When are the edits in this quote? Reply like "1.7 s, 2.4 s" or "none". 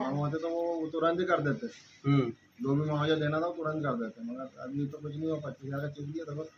none